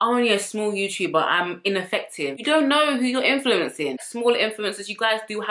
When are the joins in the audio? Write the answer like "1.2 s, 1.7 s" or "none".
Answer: 2.3 s, 4.1 s